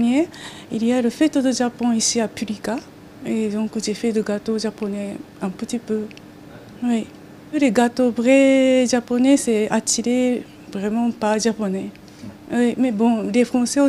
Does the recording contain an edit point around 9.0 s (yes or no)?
no